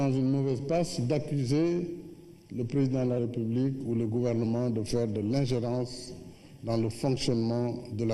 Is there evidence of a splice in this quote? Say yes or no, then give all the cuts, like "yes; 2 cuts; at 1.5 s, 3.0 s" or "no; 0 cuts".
no; 0 cuts